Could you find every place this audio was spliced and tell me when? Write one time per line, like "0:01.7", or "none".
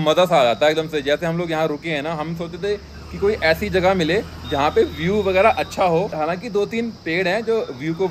none

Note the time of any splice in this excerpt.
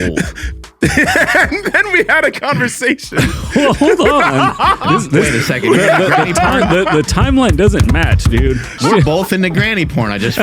0:08.8

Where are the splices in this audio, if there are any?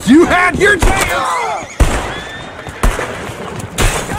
none

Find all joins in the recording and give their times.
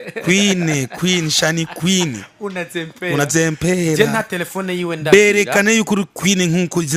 none

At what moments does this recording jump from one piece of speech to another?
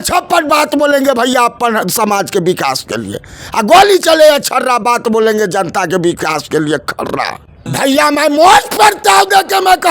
0:07.6

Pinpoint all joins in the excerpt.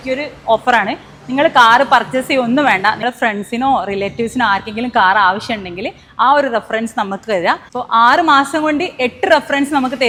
none

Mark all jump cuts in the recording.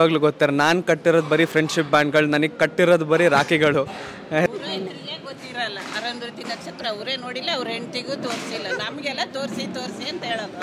0:04.5

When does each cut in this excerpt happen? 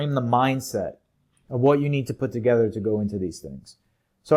none

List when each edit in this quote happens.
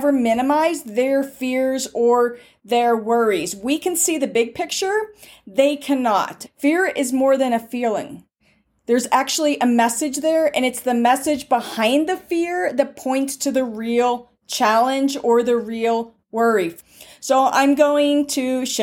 0:06.4
0:16.7

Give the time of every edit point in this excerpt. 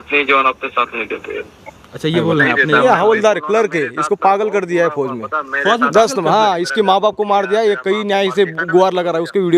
none

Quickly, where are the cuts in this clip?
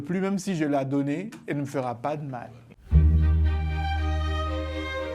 0:02.8

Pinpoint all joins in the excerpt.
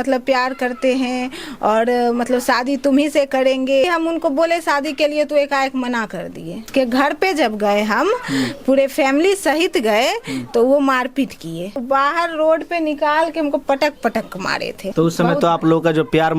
0:03.8
0:06.7
0:11.8
0:14.8

